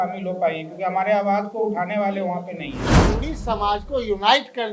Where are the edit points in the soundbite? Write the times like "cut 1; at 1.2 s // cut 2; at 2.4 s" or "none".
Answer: cut 1; at 2.9 s

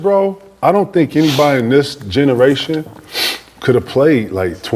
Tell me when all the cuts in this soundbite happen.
none

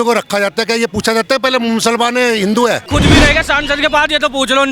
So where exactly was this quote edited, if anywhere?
cut 1; at 2.9 s

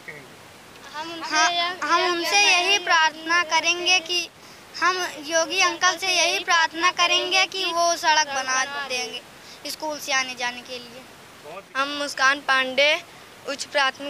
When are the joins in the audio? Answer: cut 1; at 11.7 s

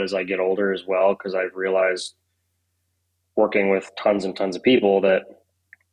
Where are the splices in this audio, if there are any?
none

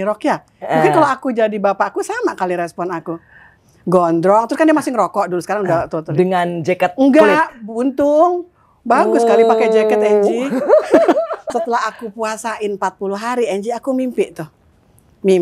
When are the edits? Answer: cut 1; at 11.4 s

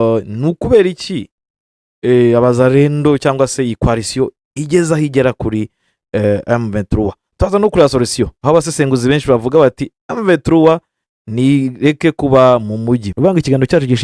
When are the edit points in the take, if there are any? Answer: cut 1; at 13.1 s

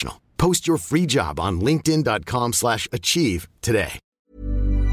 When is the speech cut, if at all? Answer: cut 1; at 4.0 s

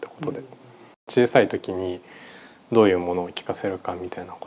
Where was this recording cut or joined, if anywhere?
cut 1; at 1.1 s

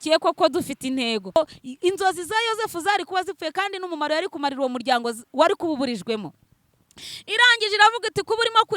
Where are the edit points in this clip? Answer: cut 1; at 1.4 s

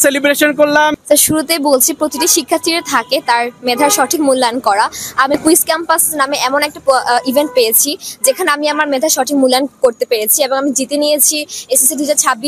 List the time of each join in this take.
cut 1; at 0.9 s

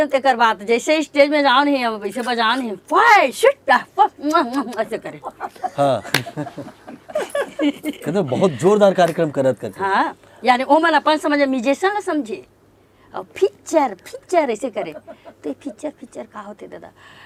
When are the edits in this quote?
none

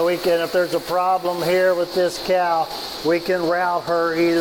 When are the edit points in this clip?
none

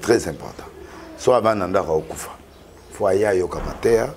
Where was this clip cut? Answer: none

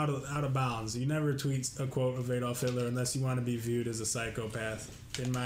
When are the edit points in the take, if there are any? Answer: none

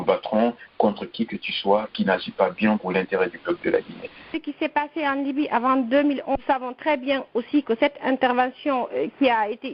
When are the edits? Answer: cut 1; at 6.4 s

